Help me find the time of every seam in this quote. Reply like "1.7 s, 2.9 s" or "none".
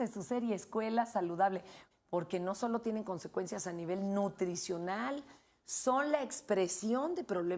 none